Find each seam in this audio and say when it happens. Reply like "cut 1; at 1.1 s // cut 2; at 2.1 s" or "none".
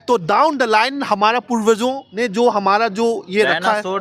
cut 1; at 2.1 s